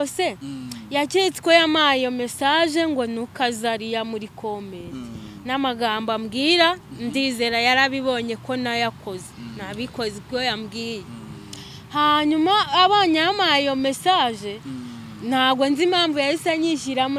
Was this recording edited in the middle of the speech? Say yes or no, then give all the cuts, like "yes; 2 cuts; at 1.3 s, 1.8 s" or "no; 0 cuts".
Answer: no; 0 cuts